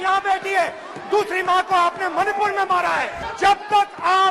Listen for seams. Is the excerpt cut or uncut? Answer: cut